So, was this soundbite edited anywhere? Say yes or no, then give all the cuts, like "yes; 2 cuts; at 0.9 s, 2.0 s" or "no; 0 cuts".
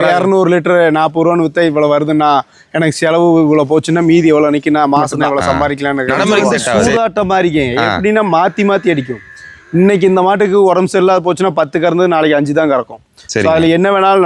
yes; 1 cut; at 6.1 s